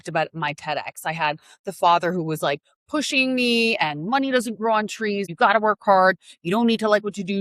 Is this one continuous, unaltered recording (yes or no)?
no